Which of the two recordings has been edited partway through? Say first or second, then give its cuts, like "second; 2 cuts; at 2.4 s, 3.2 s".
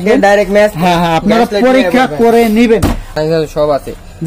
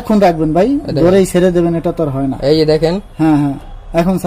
first; 1 cut; at 3.1 s